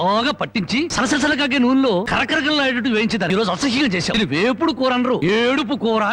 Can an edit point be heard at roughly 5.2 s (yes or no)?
yes